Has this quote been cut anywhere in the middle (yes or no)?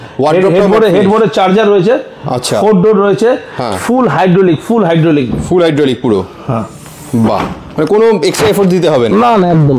no